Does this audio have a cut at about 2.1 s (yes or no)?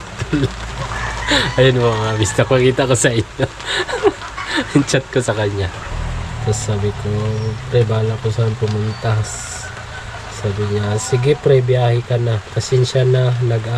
no